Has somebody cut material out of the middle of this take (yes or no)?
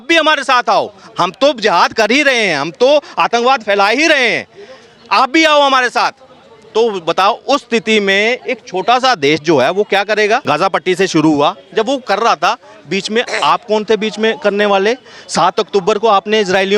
yes